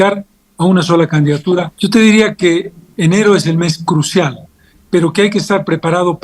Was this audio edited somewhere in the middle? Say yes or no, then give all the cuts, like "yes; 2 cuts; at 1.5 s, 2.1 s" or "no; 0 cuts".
yes; 1 cut; at 1.7 s